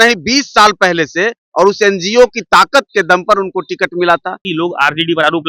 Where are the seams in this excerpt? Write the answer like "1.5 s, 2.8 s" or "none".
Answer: 4.4 s